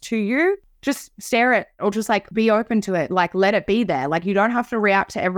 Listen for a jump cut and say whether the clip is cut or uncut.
uncut